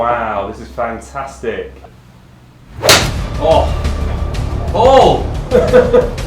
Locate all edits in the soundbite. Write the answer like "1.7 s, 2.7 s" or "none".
1.8 s